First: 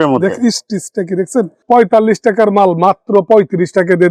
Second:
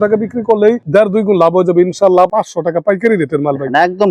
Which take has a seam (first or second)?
second